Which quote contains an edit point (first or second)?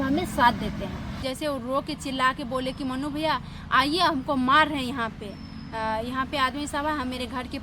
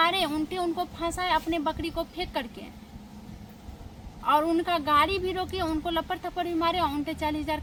first